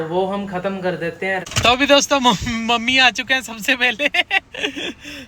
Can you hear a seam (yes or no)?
yes